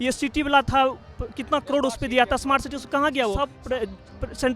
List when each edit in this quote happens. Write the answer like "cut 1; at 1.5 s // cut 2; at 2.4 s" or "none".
cut 1; at 3.5 s

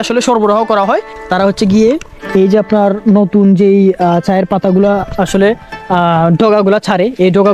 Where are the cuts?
cut 1; at 1.2 s

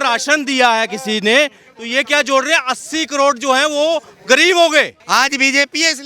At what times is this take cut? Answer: cut 1; at 5.0 s

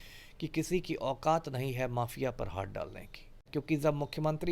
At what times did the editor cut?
cut 1; at 3.4 s

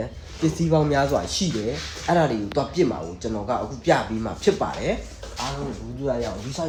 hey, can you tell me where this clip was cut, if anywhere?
none

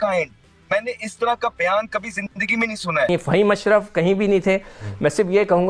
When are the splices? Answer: cut 1; at 3.1 s

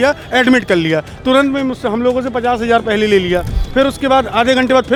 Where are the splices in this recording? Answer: none

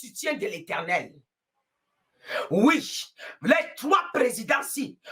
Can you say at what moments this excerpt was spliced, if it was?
none

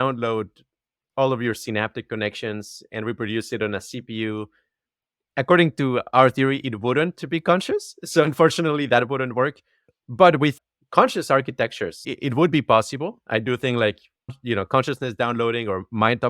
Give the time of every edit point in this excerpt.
cut 1; at 10.5 s // cut 2; at 12.1 s // cut 3; at 14.4 s

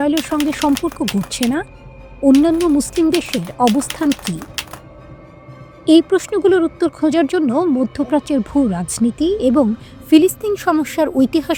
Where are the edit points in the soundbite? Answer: none

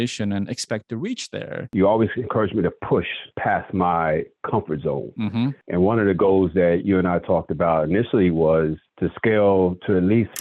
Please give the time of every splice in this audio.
cut 1; at 1.7 s // cut 2; at 5.6 s

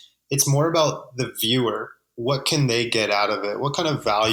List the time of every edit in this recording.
none

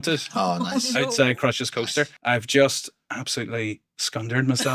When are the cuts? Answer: cut 1; at 2.2 s

